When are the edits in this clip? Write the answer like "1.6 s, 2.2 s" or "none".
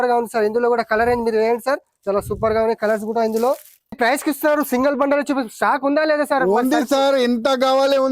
4.0 s